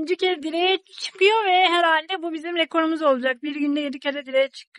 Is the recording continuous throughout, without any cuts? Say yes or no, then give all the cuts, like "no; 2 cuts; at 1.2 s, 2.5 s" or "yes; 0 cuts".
yes; 0 cuts